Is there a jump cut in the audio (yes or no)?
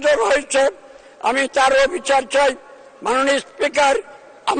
no